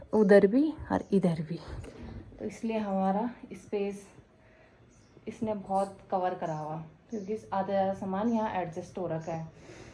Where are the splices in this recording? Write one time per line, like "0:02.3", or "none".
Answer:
none

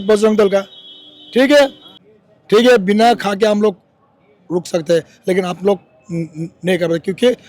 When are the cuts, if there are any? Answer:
0:01.9

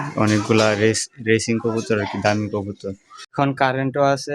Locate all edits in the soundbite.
0:03.4

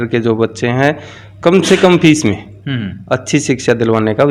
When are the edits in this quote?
none

